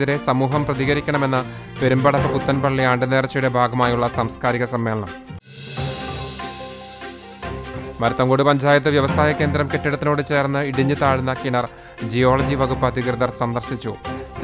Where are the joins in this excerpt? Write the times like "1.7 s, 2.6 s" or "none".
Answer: none